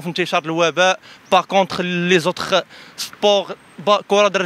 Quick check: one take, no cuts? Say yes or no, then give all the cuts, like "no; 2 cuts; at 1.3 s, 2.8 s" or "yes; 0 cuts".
yes; 0 cuts